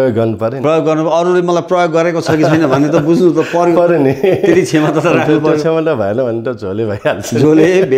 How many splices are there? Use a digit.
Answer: 0